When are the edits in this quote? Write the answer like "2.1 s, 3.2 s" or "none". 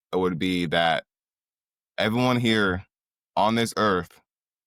none

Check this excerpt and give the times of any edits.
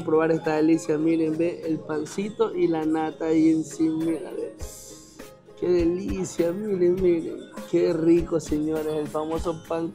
none

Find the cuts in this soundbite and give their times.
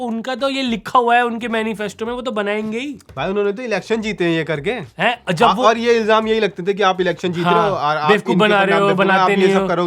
none

